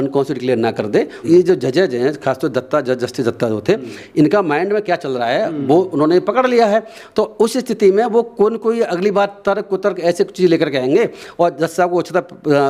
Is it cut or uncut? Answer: cut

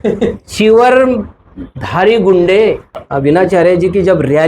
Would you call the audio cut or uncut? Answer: cut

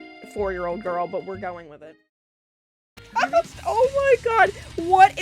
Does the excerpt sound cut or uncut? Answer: cut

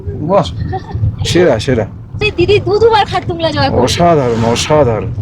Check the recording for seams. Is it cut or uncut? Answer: uncut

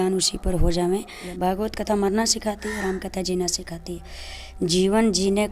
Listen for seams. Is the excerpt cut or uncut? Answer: cut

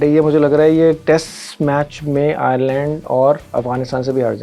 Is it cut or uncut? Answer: uncut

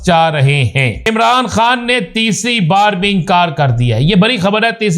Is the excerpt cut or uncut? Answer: cut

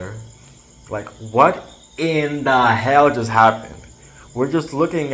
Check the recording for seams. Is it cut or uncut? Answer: uncut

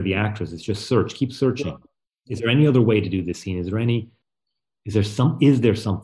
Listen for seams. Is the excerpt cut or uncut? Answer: cut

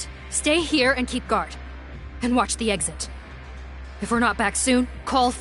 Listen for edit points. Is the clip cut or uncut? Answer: uncut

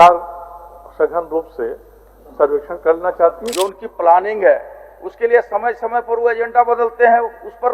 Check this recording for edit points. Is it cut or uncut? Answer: cut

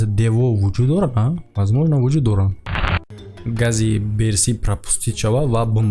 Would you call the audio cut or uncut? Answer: cut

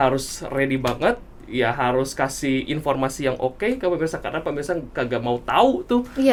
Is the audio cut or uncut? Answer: uncut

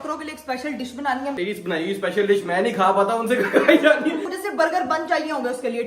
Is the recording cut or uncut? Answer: cut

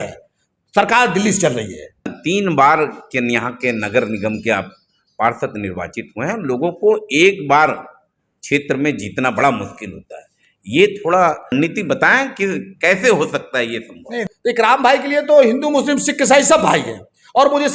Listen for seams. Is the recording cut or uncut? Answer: cut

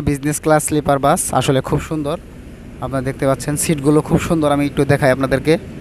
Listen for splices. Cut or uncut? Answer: uncut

